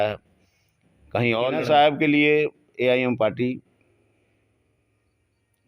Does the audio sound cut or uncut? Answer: cut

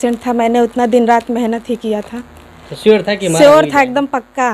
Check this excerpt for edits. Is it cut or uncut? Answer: uncut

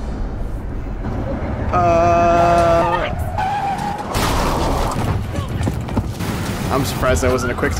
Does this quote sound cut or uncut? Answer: cut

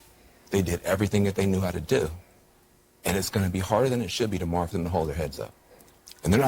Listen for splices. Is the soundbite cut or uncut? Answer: cut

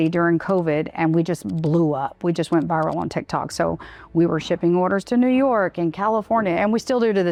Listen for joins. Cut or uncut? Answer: uncut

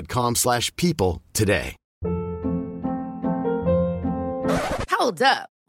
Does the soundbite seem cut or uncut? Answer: cut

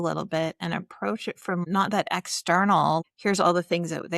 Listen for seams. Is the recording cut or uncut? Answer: cut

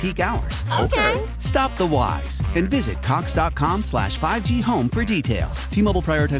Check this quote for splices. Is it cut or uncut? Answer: uncut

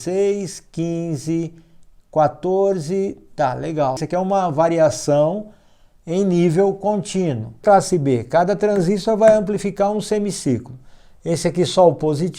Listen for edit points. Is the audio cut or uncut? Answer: cut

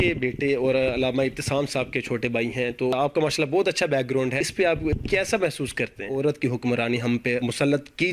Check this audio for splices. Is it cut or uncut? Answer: cut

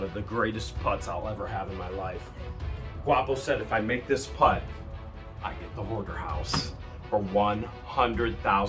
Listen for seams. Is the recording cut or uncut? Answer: uncut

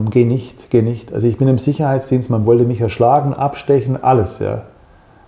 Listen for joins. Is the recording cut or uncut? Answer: uncut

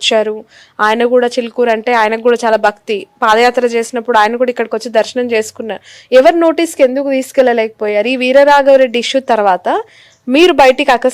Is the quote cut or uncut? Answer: uncut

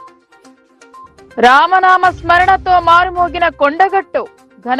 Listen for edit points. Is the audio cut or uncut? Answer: cut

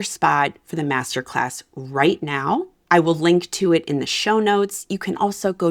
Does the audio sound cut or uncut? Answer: cut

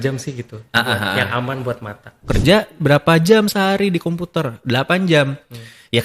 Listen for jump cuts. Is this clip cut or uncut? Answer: cut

